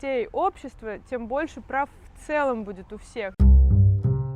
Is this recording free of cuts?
no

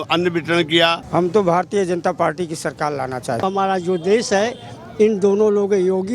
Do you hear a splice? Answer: yes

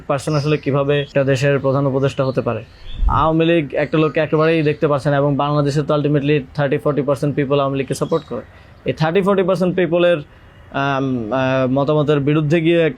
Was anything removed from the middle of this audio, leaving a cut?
yes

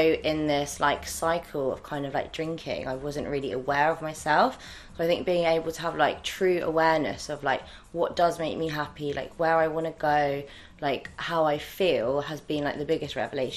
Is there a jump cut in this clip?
no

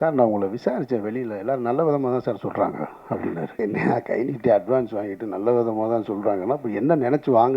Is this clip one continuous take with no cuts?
no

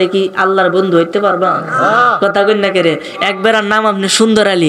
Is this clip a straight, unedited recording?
yes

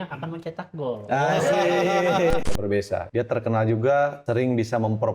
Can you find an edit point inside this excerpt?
yes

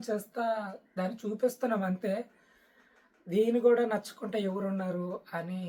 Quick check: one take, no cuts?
yes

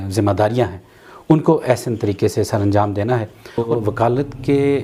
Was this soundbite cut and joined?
yes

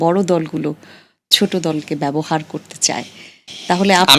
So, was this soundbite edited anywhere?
no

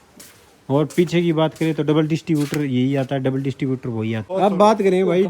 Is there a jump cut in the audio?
yes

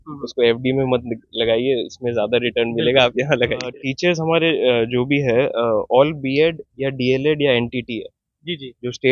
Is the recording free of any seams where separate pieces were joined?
no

